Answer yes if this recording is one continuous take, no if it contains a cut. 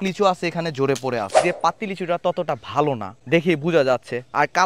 no